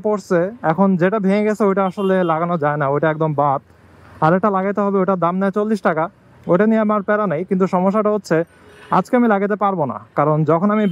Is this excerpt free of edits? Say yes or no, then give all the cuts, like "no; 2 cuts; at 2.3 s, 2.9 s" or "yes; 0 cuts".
yes; 0 cuts